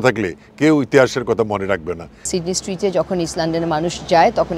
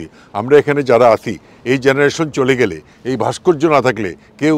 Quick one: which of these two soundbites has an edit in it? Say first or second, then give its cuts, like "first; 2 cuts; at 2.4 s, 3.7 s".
first; 1 cut; at 2.3 s